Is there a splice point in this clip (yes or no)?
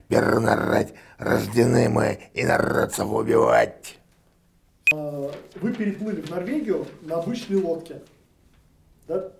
yes